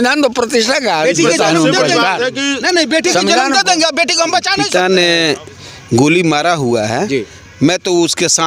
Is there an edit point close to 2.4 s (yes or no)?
no